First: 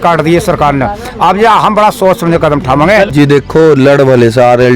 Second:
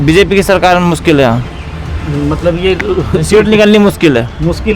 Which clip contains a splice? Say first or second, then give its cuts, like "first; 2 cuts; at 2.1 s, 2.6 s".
first; 1 cut; at 3.1 s